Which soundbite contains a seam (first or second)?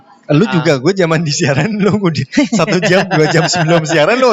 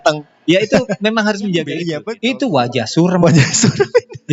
second